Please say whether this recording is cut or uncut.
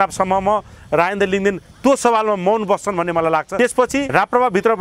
cut